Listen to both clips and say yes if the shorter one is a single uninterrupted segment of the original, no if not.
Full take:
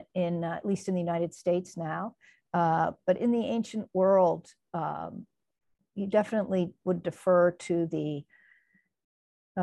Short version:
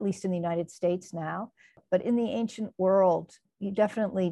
no